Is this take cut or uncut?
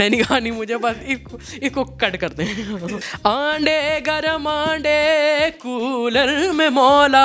cut